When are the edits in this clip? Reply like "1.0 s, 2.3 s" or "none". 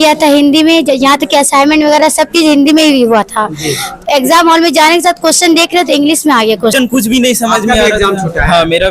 6.7 s